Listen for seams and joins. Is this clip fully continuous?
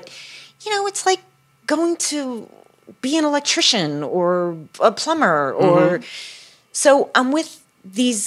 yes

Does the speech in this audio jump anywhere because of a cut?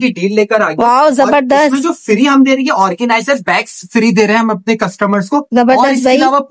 no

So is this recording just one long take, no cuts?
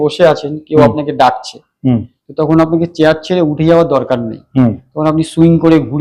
yes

